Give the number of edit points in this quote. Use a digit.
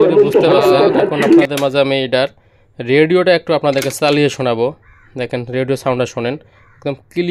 1